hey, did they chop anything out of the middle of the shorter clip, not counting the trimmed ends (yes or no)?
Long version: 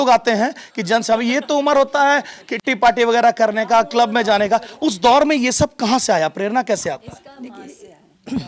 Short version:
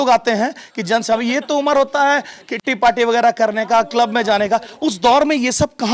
no